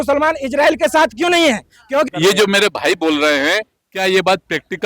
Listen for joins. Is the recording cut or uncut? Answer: cut